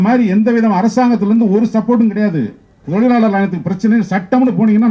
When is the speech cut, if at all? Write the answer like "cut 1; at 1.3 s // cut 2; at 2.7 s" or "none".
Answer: cut 1; at 2.8 s